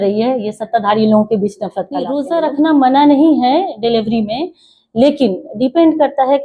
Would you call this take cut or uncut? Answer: cut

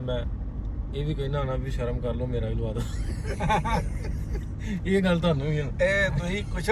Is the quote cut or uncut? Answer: uncut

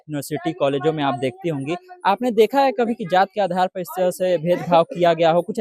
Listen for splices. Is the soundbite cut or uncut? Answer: uncut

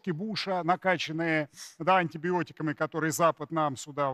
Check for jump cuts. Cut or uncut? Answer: uncut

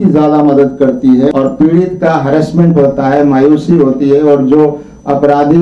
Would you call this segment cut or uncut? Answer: cut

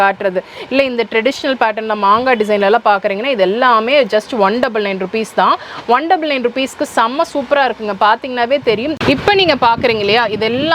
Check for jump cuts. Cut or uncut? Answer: cut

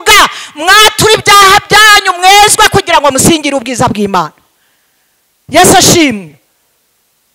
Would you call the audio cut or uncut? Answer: uncut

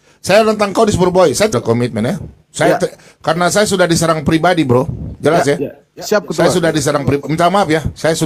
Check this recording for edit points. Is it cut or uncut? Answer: cut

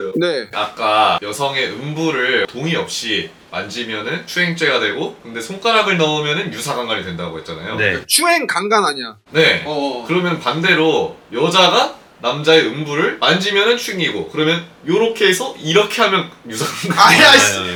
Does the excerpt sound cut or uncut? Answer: uncut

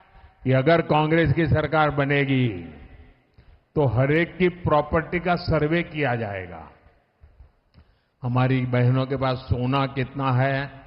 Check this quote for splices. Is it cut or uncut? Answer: uncut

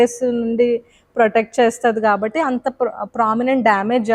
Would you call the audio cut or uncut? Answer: uncut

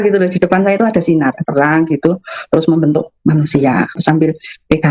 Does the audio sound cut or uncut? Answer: cut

